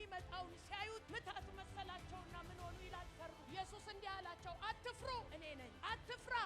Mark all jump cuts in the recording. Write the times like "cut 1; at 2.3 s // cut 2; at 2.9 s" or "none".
none